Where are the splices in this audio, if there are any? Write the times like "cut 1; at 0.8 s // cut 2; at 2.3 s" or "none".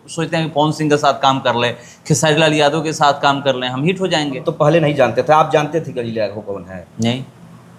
cut 1; at 4.5 s